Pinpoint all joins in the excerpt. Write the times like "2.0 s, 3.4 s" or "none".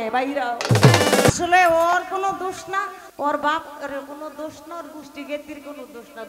1.3 s, 3.0 s